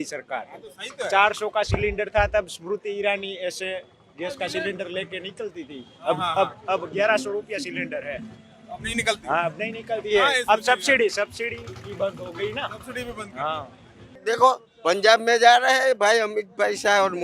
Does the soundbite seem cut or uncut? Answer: cut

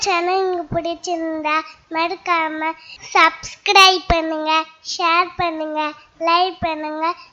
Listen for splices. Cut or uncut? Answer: uncut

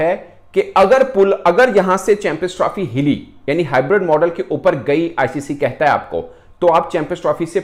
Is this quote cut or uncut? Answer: uncut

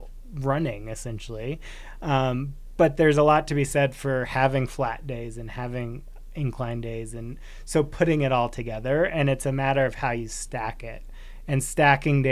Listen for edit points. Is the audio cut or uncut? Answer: uncut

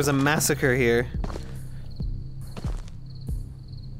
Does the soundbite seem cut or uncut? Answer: uncut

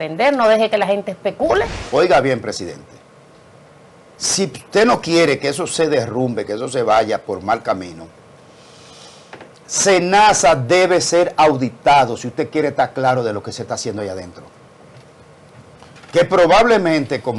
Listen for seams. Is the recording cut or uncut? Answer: cut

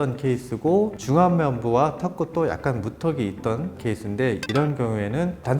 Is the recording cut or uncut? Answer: cut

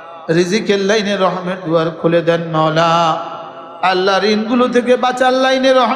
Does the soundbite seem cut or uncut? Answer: uncut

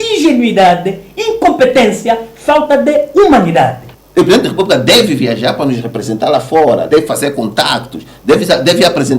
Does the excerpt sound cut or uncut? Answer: cut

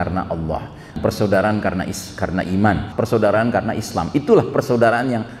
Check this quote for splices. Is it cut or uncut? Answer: cut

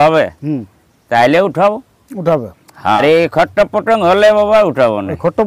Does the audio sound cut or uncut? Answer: cut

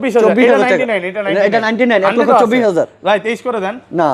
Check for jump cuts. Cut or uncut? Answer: uncut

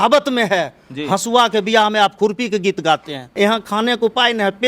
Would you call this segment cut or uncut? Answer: cut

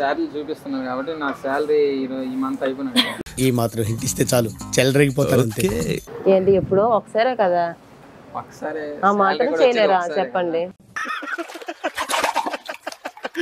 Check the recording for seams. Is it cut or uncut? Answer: uncut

